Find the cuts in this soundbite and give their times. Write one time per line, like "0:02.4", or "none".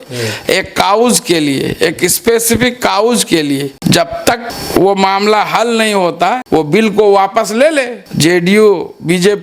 0:03.7
0:04.5
0:06.4
0:08.0